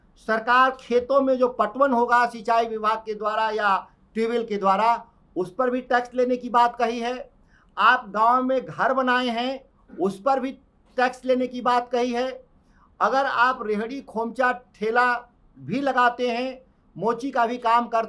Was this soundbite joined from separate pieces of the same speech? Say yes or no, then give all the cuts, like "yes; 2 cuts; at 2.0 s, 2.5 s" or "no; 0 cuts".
no; 0 cuts